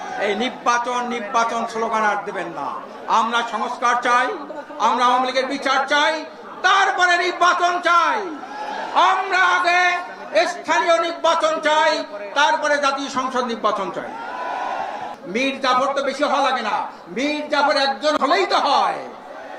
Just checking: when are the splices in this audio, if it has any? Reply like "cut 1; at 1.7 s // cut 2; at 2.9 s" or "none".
cut 1; at 15.1 s